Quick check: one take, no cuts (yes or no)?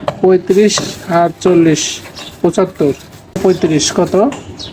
no